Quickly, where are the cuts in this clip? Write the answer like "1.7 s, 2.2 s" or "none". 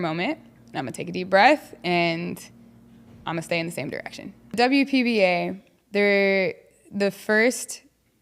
4.5 s